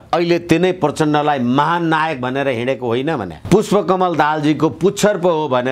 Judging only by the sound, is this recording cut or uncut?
cut